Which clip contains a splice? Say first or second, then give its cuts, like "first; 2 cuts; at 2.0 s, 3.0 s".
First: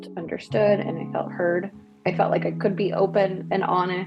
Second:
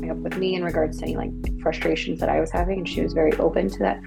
first; 1 cut; at 1.8 s